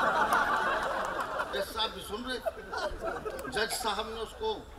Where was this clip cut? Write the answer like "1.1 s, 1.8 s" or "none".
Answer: 1.5 s